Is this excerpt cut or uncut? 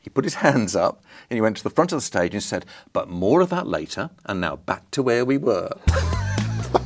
uncut